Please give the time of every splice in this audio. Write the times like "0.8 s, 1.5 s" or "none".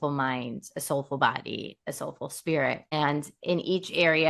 2.9 s